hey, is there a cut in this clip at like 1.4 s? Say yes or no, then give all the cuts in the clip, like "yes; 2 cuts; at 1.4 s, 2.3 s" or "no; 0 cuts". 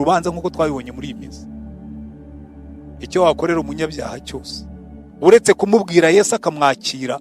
yes; 2 cuts; at 1.4 s, 2.8 s